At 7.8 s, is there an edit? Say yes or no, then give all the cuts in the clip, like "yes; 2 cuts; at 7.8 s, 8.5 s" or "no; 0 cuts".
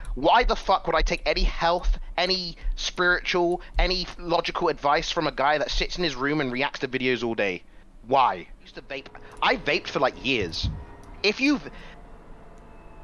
no; 1 cut; at 9.2 s